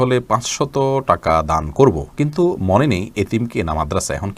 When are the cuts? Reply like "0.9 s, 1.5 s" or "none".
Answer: none

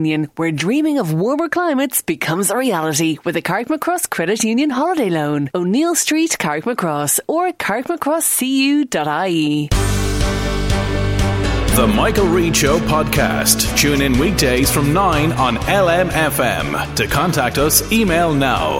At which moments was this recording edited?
9.7 s

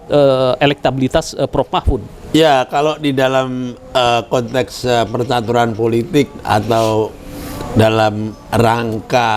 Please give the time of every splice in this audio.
none

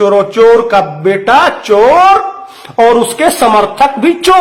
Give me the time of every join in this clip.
none

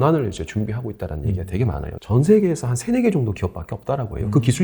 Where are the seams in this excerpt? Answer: 1.9 s

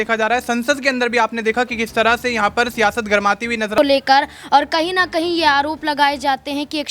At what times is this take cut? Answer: 3.8 s

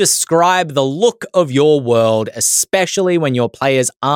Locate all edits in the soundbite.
none

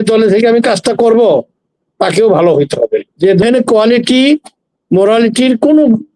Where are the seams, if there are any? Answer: 3.4 s

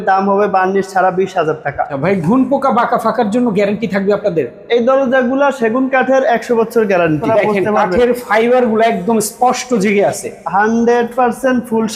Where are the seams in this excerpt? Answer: 1.9 s, 7.2 s

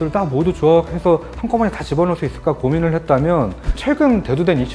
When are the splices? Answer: 3.7 s

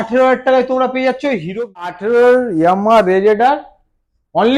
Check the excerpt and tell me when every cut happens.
1.9 s

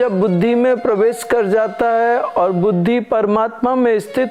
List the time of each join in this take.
none

